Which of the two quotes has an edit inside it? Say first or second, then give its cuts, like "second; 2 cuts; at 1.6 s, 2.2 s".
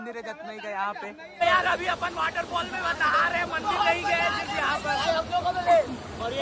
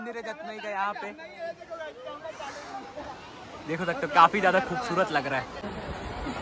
first; 1 cut; at 1.4 s